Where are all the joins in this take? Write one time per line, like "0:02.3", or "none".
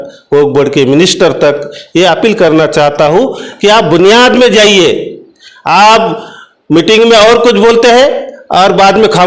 none